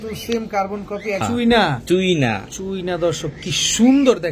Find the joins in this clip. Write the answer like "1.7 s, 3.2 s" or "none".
1.2 s

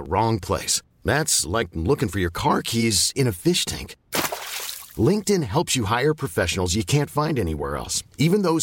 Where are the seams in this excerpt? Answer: none

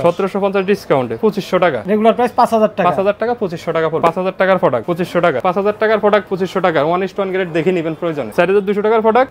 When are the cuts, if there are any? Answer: 1.6 s, 4.0 s, 5.4 s, 6.3 s, 8.3 s

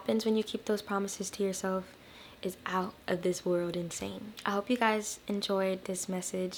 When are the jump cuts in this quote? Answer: none

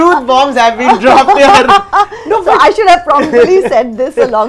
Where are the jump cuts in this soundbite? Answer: none

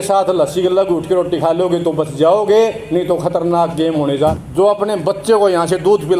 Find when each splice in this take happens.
4.3 s

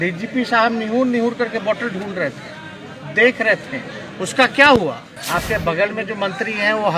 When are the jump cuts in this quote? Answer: 5.1 s

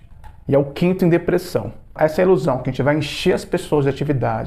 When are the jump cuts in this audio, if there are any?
2.0 s

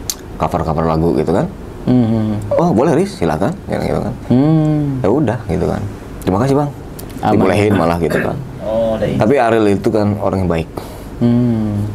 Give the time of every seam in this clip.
none

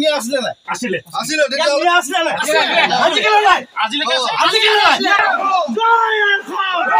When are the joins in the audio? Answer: 5.2 s

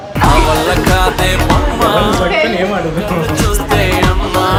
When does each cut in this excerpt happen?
none

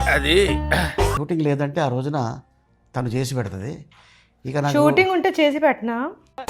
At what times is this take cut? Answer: 1.2 s

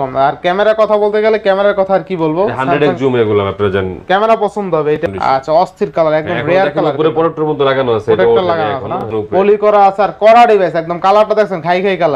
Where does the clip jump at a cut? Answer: 5.0 s, 9.1 s

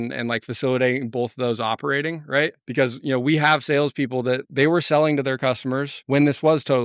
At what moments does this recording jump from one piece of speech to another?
4.4 s, 5.9 s

